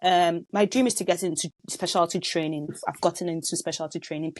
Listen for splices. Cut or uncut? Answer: uncut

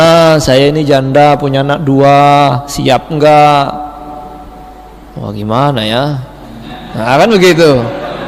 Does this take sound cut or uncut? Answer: uncut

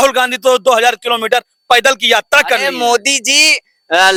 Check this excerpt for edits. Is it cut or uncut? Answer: uncut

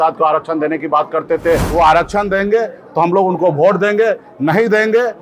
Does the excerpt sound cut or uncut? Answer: cut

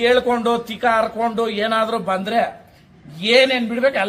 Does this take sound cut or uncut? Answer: uncut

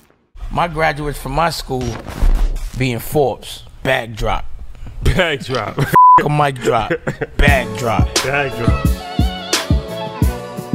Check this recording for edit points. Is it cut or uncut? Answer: uncut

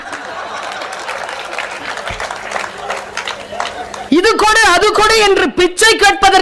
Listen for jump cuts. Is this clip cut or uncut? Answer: uncut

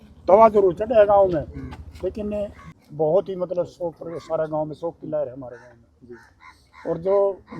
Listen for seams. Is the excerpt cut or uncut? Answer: cut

